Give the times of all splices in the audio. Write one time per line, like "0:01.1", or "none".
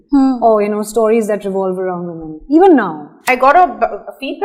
0:03.2